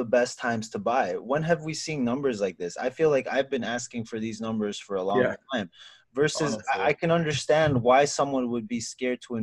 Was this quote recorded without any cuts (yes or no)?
yes